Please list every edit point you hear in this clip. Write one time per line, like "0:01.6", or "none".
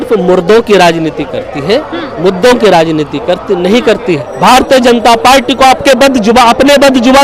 0:04.3